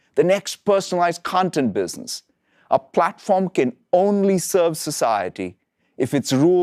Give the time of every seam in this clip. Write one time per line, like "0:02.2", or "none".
none